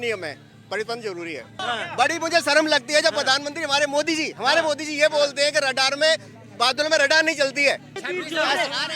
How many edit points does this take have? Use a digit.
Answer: 2